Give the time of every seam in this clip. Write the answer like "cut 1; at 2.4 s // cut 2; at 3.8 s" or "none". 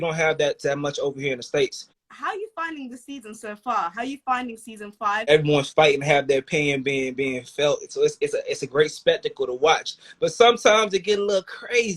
cut 1; at 1.9 s // cut 2; at 5.3 s